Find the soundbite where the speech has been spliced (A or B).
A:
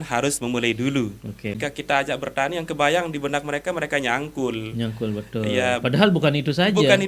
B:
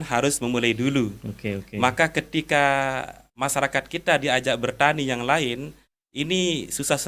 A